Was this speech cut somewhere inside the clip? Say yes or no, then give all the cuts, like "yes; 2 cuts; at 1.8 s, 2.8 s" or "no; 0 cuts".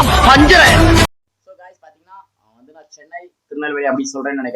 yes; 1 cut; at 1.1 s